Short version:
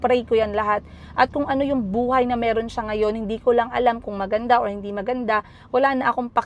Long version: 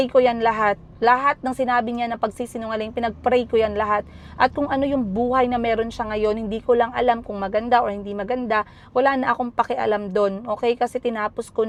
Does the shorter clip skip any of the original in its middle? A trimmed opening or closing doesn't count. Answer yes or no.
no